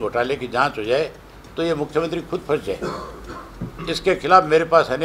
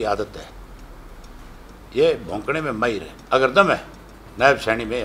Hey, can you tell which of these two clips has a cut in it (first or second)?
second